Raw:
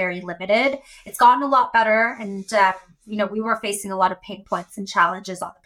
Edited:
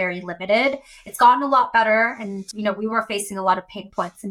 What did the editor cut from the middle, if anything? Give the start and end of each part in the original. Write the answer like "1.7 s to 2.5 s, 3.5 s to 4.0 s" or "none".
2.4 s to 2.9 s